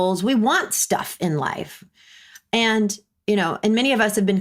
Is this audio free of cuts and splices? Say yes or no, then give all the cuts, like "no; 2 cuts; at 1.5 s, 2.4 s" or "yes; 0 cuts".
yes; 0 cuts